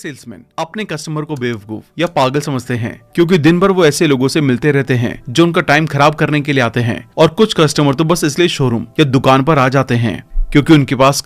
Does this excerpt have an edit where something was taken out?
no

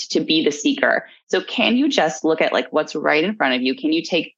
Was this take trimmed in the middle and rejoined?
yes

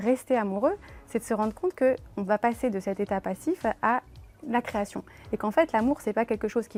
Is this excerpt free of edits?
yes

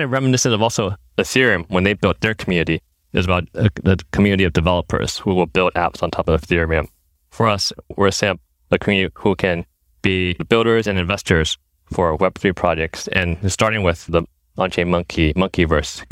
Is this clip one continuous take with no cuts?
no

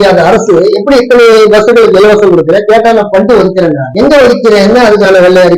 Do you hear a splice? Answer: no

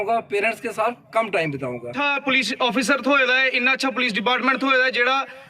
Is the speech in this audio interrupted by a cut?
yes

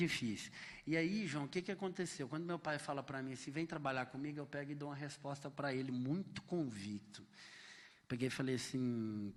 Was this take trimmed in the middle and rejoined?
no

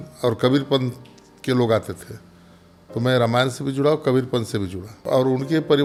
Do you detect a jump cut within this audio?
no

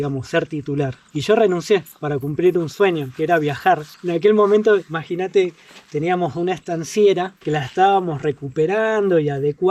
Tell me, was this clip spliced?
no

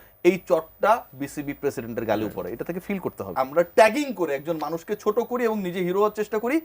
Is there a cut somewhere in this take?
yes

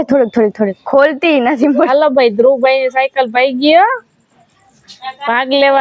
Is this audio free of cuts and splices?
no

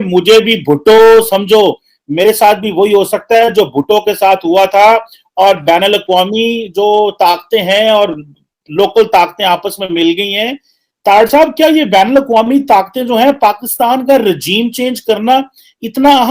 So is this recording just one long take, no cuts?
yes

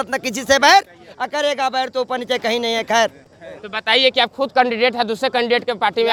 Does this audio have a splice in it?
no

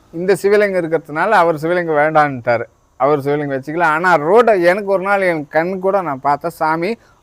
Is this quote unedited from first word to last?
yes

